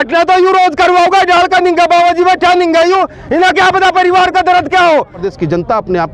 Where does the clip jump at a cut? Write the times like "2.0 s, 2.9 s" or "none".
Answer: 5.2 s

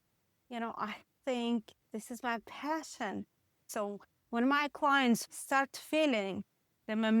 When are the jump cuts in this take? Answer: 3.6 s, 5.3 s

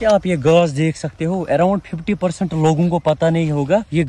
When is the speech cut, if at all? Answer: none

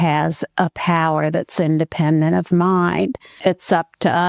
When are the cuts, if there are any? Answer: 3.4 s

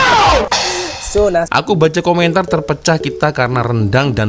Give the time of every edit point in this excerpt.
1.5 s

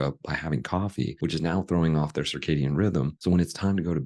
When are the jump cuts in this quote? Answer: 1.1 s, 3.1 s

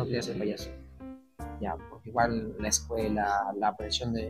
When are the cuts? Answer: none

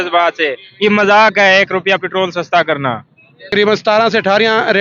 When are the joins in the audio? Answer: 3.5 s

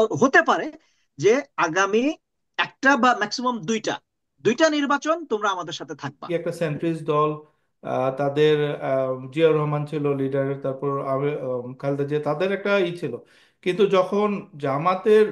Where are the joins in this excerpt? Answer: 6.3 s

